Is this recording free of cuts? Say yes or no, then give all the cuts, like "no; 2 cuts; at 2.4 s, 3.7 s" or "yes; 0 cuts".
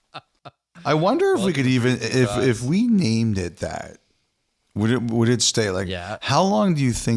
yes; 0 cuts